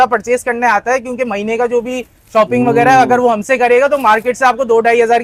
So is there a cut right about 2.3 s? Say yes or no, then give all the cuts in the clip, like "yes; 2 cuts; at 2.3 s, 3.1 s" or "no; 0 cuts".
no; 0 cuts